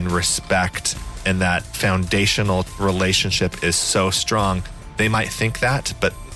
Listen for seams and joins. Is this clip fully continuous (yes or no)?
no